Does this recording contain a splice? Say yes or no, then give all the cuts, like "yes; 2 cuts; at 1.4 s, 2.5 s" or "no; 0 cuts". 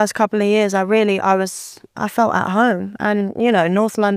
no; 0 cuts